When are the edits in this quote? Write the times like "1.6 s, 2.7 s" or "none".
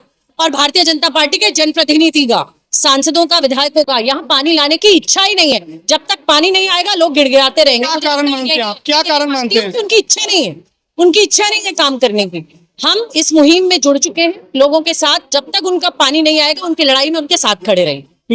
none